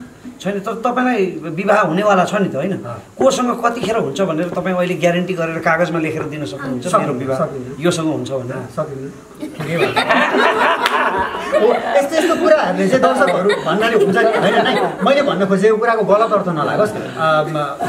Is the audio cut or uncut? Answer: cut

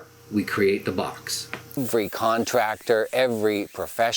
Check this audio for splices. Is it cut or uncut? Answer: cut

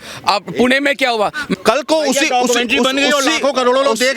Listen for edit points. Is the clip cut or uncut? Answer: cut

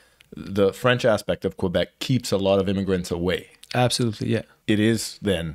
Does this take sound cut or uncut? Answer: cut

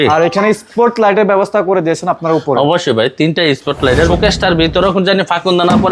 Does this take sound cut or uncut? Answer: cut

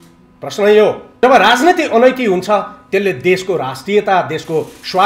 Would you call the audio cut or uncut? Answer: cut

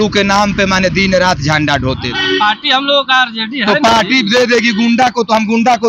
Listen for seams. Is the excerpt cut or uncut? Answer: cut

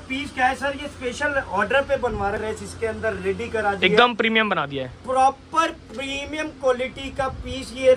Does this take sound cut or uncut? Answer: cut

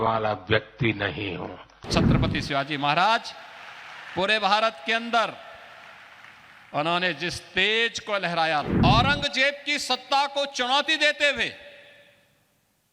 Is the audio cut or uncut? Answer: cut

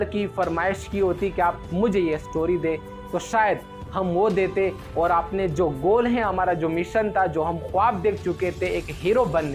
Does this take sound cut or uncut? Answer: uncut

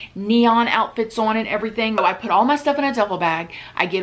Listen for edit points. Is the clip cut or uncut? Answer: cut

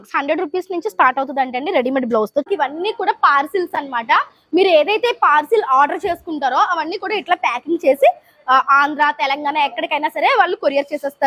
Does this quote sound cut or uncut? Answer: cut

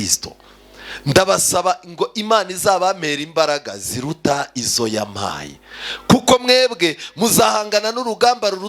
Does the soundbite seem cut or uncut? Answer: uncut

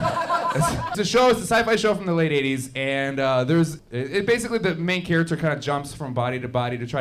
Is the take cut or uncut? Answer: cut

